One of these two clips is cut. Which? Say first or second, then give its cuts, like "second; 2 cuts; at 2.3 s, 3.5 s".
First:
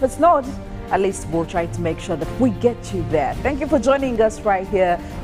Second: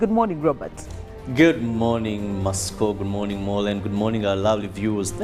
first; 1 cut; at 4.1 s